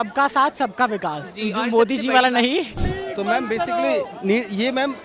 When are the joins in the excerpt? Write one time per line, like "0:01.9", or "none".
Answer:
0:02.8